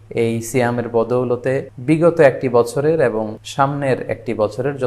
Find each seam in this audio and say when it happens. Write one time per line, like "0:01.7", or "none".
0:01.7
0:03.4